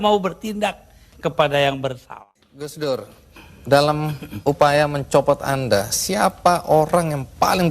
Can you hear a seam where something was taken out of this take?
yes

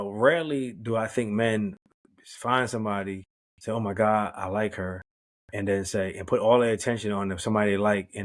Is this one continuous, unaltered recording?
yes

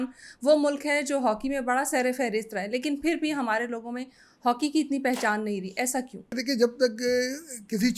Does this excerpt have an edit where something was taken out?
yes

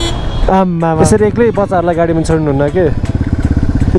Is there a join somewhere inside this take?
yes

